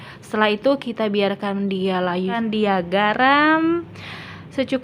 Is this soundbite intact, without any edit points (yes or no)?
no